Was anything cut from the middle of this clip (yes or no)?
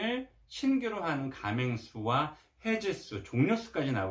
no